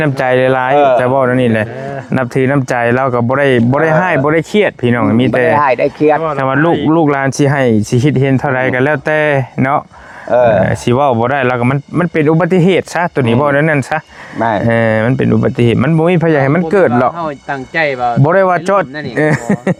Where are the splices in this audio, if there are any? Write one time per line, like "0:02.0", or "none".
none